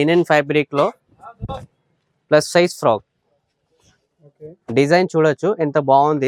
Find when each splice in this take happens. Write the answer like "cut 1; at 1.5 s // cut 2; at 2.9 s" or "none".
none